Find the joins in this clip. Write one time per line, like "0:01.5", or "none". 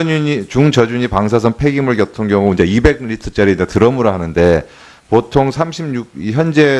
0:05.2